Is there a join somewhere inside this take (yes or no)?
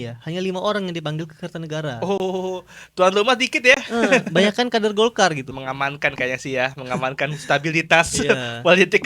yes